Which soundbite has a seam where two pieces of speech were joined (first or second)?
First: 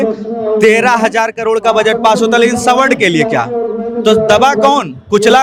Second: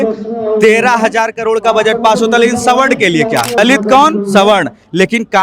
second